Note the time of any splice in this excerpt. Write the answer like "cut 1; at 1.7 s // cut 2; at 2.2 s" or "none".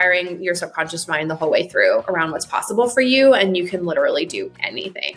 none

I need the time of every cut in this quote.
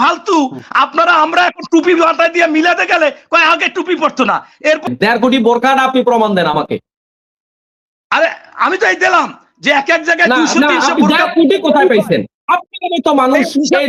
cut 1; at 4.9 s

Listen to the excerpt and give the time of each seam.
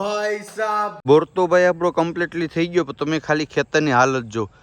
cut 1; at 1.0 s

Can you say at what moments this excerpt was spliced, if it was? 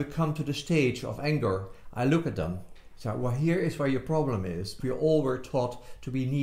cut 1; at 4.7 s

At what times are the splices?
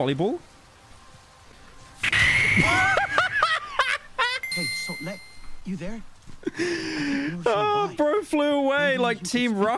none

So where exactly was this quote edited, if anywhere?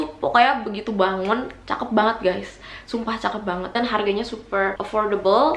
none

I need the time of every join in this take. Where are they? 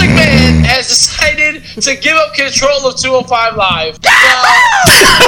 cut 1; at 3.9 s

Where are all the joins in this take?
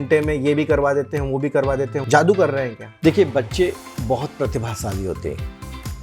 cut 1; at 2.0 s // cut 2; at 2.8 s

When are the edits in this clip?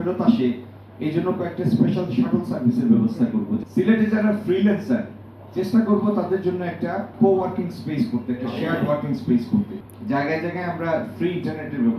cut 1; at 3.6 s // cut 2; at 7.1 s // cut 3; at 9.8 s

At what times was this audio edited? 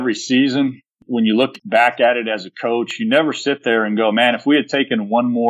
cut 1; at 0.9 s // cut 2; at 1.6 s

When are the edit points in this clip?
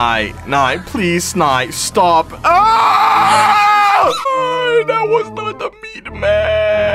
cut 1; at 4.3 s

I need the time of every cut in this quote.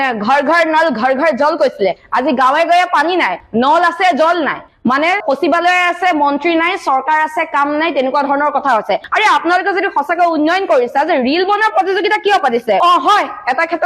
cut 1; at 9.0 s // cut 2; at 12.8 s

